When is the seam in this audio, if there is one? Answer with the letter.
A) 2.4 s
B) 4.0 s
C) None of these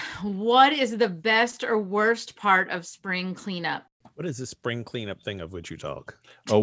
B